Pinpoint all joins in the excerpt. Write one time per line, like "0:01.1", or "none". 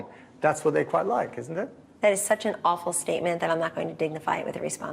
0:01.8